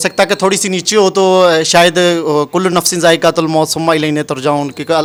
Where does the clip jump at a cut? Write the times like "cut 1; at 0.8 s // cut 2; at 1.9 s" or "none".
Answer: none

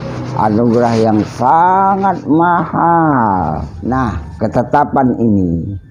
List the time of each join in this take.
cut 1; at 3.7 s

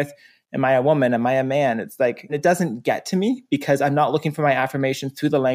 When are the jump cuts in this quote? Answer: cut 1; at 2.3 s

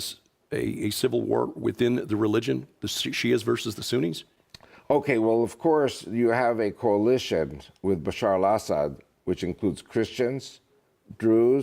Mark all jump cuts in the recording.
cut 1; at 7.3 s

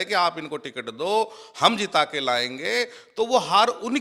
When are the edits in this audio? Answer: none

